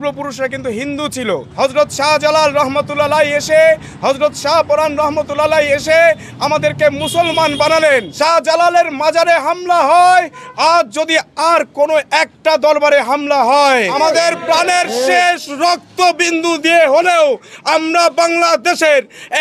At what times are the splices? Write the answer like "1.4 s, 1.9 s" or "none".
1.5 s, 8.1 s, 13.9 s

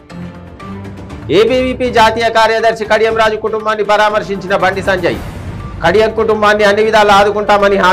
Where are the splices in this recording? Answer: none

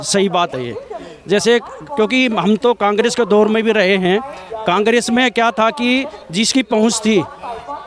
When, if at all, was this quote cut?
none

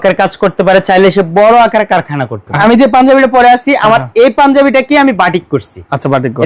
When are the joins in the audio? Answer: 2.6 s

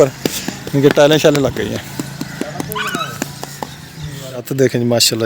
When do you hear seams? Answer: 4.3 s

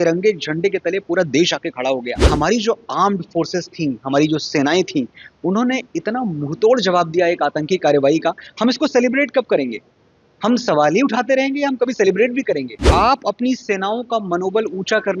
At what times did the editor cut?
2.2 s, 12.7 s

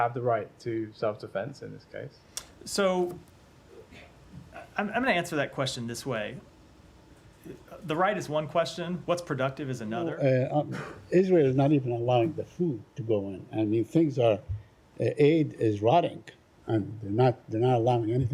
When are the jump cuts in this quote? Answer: 10.1 s

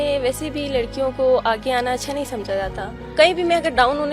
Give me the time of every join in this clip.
3.1 s

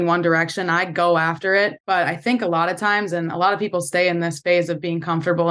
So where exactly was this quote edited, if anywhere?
1.8 s

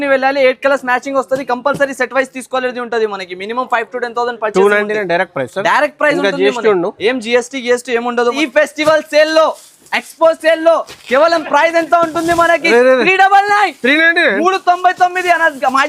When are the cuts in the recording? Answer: 8.4 s

